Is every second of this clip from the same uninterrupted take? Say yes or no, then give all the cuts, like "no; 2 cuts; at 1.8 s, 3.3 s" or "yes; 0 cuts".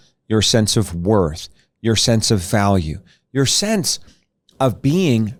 yes; 0 cuts